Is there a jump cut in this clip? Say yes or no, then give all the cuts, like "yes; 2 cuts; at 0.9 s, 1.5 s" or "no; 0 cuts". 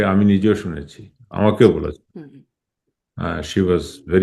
no; 0 cuts